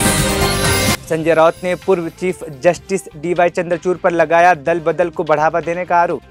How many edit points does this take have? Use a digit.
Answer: 1